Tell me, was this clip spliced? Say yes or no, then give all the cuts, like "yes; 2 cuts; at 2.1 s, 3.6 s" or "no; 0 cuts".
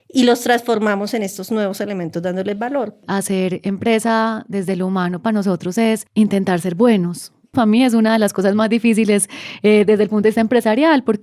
yes; 3 cuts; at 3.0 s, 6.1 s, 7.5 s